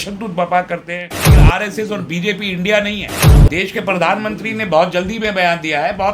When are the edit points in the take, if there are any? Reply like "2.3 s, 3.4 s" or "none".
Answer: 1.3 s, 3.4 s